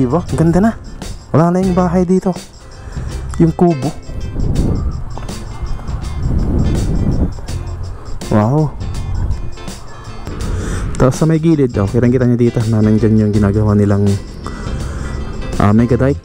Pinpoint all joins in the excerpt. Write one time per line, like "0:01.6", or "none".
0:10.3